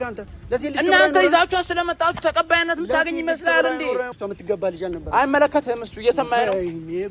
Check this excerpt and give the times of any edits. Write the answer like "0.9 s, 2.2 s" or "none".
4.1 s